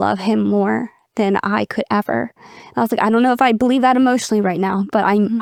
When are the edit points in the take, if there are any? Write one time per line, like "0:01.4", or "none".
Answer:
none